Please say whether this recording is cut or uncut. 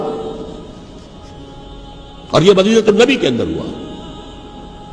uncut